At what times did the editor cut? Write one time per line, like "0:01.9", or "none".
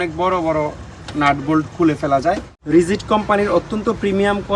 0:02.5